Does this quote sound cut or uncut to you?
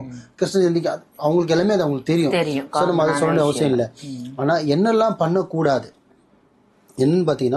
uncut